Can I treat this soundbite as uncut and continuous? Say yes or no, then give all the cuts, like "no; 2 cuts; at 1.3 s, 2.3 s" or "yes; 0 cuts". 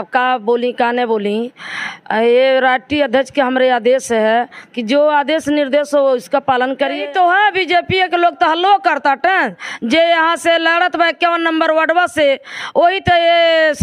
no; 1 cut; at 7.0 s